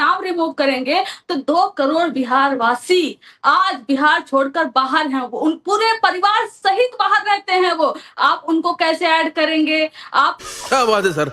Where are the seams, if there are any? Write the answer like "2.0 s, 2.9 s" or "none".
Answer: 10.4 s